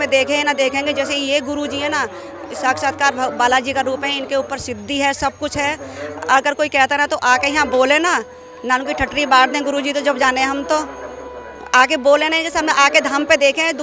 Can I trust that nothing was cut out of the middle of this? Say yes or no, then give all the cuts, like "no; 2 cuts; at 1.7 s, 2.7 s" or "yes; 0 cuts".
yes; 0 cuts